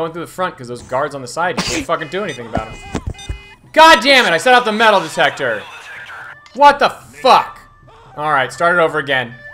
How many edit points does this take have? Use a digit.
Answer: 0